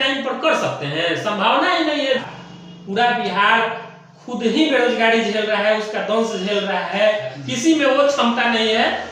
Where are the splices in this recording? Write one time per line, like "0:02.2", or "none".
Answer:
0:02.2
0:07.3